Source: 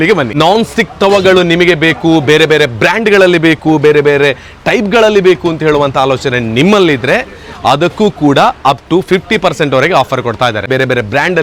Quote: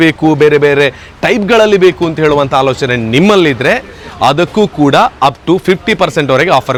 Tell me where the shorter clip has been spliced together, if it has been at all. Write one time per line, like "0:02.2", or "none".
none